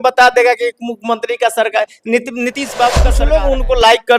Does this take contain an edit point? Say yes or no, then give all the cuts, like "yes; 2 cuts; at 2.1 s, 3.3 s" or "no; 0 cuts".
yes; 1 cut; at 3.0 s